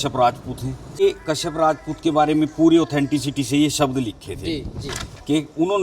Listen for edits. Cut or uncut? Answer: cut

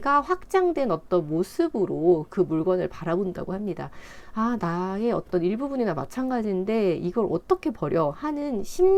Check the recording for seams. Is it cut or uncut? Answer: uncut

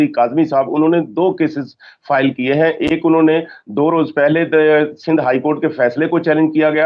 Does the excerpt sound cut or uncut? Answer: uncut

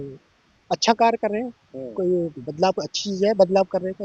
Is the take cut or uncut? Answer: uncut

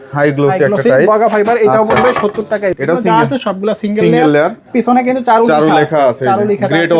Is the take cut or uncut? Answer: cut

